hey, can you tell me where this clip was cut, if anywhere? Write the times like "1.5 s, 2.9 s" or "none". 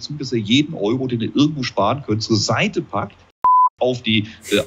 none